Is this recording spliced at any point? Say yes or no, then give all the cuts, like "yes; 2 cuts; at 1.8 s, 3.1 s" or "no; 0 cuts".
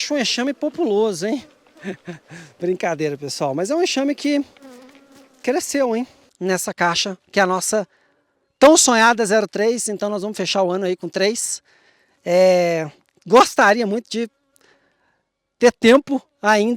yes; 1 cut; at 6.2 s